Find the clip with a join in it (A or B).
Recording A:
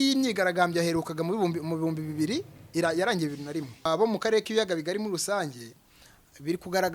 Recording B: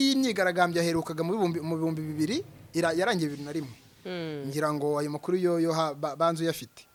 A